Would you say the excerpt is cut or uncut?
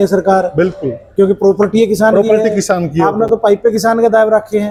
uncut